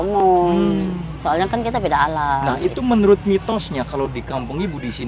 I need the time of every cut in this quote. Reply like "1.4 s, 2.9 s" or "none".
none